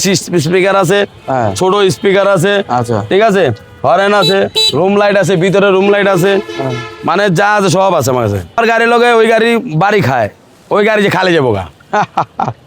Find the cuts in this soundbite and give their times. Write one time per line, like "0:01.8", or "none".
0:08.6